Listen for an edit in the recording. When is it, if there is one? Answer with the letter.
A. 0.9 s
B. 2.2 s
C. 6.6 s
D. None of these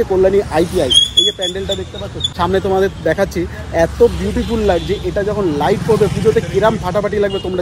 B